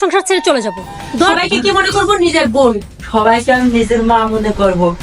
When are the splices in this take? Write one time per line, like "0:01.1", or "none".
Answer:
0:01.3